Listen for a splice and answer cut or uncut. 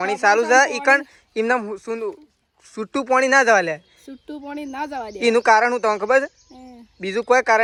uncut